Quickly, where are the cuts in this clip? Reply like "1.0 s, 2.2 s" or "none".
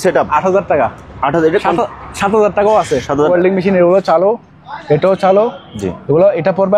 3.3 s